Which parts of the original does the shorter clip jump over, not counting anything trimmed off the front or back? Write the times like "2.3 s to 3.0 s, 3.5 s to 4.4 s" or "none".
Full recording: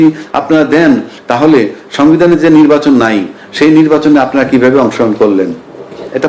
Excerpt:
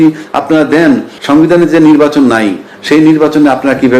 1.1 s to 1.8 s